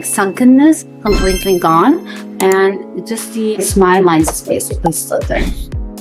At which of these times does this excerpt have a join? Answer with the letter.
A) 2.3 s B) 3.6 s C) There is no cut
B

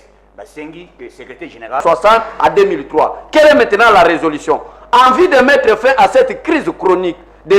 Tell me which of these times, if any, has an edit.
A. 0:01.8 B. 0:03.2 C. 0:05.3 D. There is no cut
A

